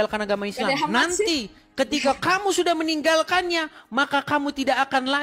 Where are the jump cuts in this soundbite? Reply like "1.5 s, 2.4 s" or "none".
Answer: none